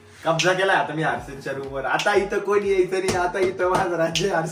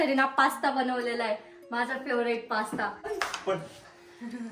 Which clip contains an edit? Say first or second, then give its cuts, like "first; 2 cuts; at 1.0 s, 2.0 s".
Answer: second; 1 cut; at 3.1 s